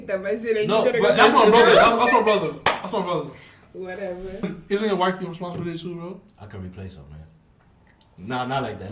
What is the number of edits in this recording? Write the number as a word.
one